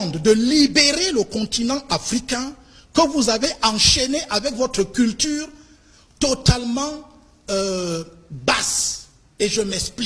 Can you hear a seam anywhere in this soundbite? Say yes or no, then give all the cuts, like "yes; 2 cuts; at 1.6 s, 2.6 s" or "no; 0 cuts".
no; 0 cuts